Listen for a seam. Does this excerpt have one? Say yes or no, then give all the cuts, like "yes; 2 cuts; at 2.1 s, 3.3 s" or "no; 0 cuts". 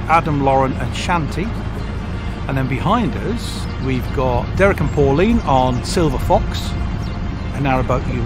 yes; 2 cuts; at 2.1 s, 3.6 s